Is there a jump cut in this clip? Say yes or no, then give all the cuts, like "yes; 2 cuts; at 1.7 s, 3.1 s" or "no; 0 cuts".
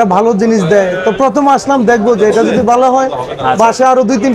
no; 0 cuts